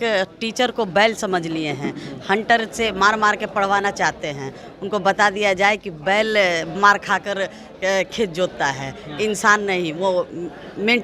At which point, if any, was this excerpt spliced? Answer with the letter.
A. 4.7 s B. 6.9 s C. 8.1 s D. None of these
D